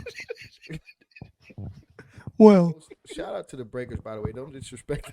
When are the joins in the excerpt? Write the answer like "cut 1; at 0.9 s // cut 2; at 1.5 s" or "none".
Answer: cut 1; at 2.9 s